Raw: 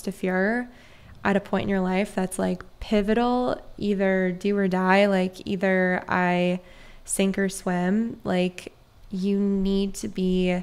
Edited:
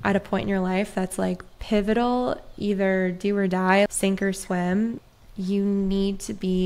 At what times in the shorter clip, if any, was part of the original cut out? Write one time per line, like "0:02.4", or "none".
0:03.9
0:05.0